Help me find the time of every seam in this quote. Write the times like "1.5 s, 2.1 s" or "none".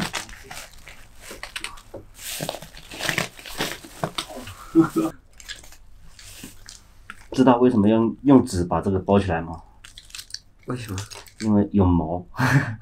2.3 s, 5.1 s